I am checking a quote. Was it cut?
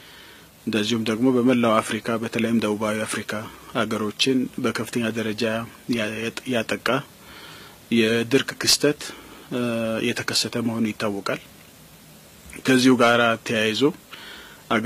no; 0 cuts

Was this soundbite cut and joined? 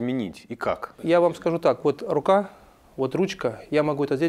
yes; 1 cut; at 1.0 s

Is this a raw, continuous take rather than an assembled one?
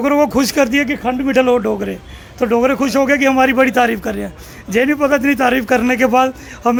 yes; 0 cuts

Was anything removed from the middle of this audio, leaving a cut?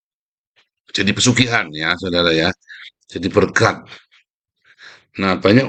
no; 0 cuts

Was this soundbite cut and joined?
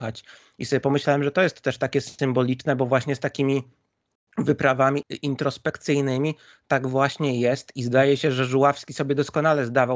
yes; 1 cut; at 5.1 s

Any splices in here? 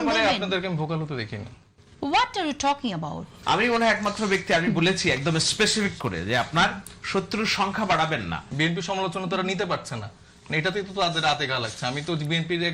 yes; 2 cuts; at 3.3 s, 8.4 s

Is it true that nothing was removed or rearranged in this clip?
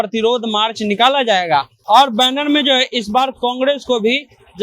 no; 1 cut; at 1.7 s

